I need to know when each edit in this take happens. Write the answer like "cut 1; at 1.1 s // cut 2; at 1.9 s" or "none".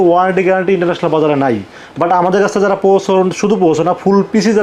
none